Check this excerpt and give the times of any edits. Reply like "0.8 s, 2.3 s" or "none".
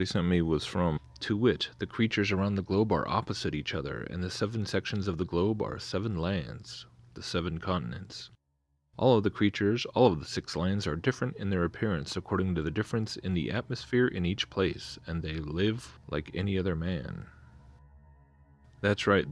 none